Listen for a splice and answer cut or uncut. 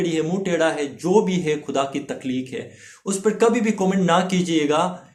uncut